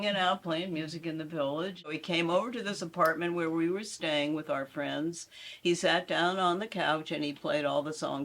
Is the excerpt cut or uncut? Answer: cut